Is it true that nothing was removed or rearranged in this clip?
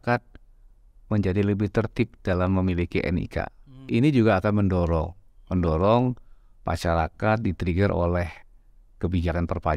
no; 1 cut; at 3.9 s

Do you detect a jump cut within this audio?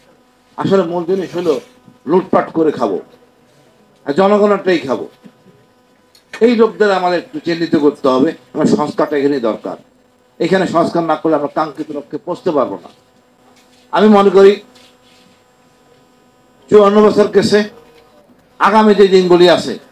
no; 0 cuts

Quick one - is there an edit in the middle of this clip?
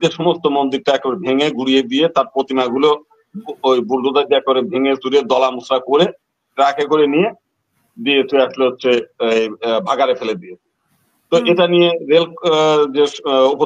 no; 0 cuts

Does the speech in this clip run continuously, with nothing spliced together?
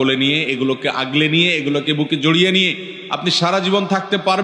yes; 0 cuts

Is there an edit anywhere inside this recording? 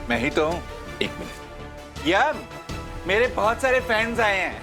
no; 0 cuts

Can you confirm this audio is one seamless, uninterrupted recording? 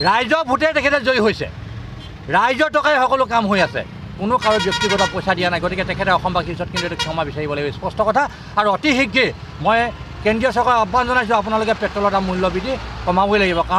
yes; 0 cuts

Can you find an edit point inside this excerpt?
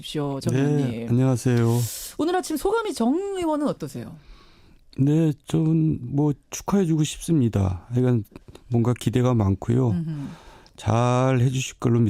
yes; 1 cut; at 6.6 s

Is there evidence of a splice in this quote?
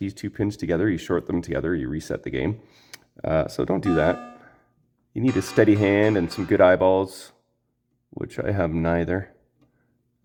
no; 0 cuts

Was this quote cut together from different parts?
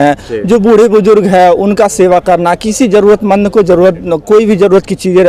no; 0 cuts

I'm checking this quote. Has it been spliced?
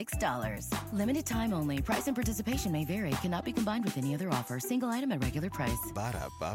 no; 0 cuts

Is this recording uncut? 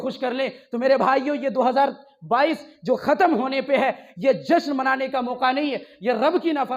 yes; 0 cuts

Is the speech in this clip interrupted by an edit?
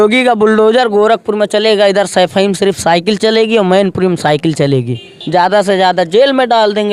yes; 1 cut; at 5.1 s

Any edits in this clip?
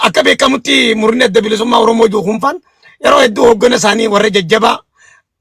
no; 0 cuts

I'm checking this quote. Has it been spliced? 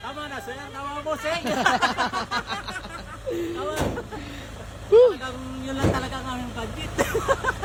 no; 0 cuts

